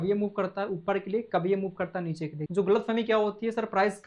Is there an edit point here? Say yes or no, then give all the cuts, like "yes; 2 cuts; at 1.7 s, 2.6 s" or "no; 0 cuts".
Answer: yes; 1 cut; at 2.3 s